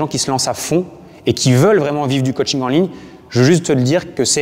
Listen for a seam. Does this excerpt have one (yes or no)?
no